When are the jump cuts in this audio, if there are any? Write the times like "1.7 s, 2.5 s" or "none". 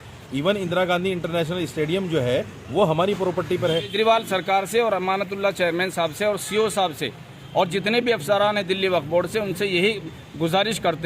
3.7 s